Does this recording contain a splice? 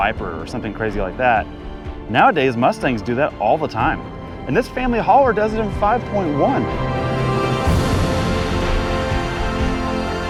no; 0 cuts

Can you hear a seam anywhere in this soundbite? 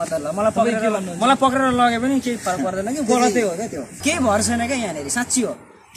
yes; 1 cut; at 3.9 s

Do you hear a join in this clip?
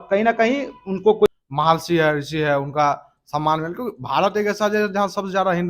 yes; 1 cut; at 1.3 s

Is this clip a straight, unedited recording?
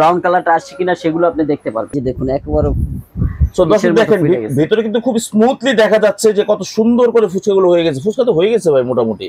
no; 1 cut; at 2.0 s

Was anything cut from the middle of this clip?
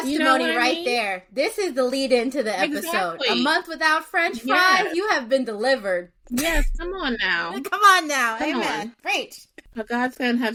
no; 0 cuts

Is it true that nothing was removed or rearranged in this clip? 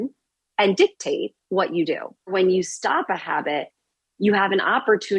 no; 1 cut; at 2.3 s

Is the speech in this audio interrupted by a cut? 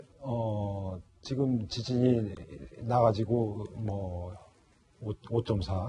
no; 0 cuts

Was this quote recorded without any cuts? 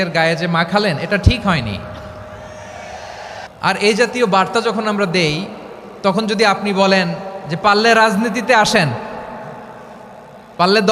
no; 1 cut; at 3.4 s

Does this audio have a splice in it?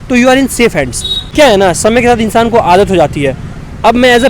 yes; 1 cut; at 1.3 s

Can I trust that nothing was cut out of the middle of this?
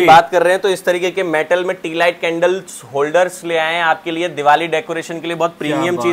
yes; 0 cuts

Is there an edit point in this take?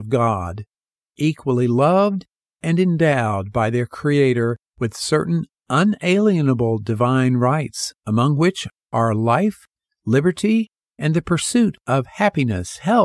yes; 1 cut; at 8.7 s

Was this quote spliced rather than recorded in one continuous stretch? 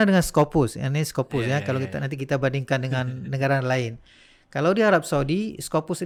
no; 0 cuts

